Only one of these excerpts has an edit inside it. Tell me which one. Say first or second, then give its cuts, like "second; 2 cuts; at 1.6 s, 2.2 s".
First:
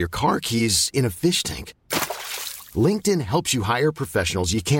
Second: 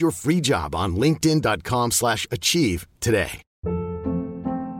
second; 1 cut; at 3.5 s